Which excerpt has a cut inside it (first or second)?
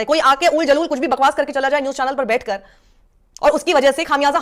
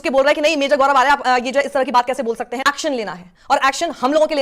second